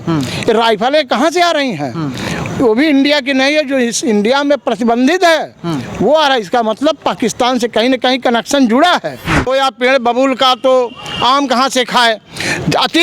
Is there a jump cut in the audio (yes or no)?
yes